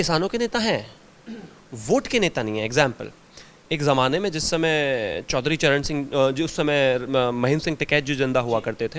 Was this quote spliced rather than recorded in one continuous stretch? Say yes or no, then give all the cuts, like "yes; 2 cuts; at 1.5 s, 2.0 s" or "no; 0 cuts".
no; 0 cuts